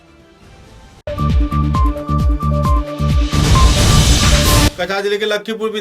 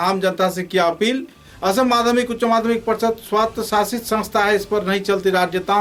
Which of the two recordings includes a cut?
first; 1 cut; at 1.0 s

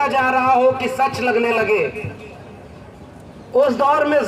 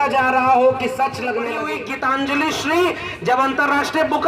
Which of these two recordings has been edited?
second; 1 cut; at 1.6 s

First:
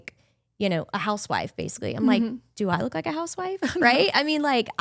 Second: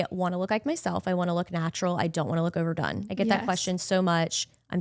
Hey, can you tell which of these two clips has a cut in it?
second; 1 cut; at 3.0 s

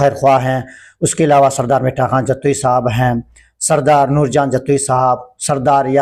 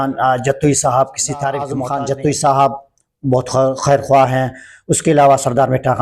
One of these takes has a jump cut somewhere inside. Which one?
second; 1 cut; at 1.8 s

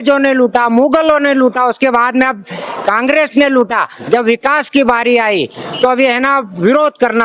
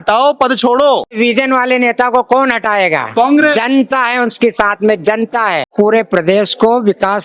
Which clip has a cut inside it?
second; 2 cuts; at 1.2 s, 5.7 s

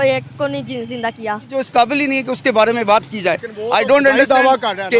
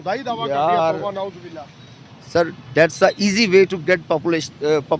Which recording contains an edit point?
first; 1 cut; at 1.6 s

